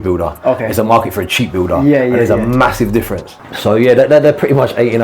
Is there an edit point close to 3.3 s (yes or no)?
yes